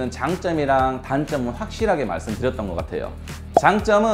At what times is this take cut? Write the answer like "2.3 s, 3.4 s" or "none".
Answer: none